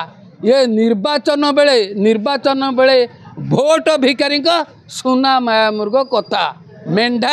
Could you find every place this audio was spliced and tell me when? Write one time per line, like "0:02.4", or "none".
none